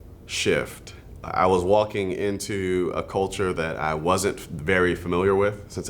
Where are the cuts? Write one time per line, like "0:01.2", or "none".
0:01.1